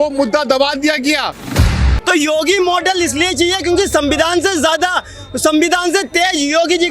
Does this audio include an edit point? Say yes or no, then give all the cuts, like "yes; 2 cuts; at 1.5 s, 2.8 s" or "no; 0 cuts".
yes; 1 cut; at 1.8 s